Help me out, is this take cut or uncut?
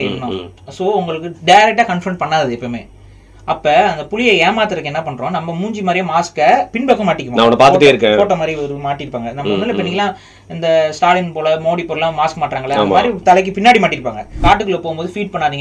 cut